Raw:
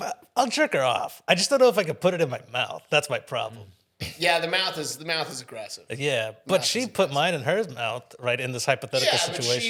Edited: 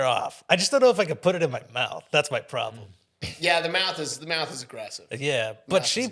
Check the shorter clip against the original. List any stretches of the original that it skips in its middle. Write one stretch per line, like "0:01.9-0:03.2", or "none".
none